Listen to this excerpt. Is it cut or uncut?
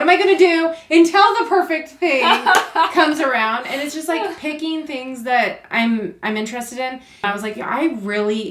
cut